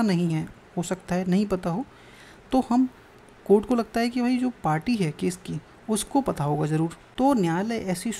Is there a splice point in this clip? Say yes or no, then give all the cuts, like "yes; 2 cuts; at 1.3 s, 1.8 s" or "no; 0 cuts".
yes; 1 cut; at 7.0 s